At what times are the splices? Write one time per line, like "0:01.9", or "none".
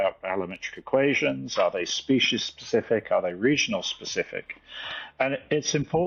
none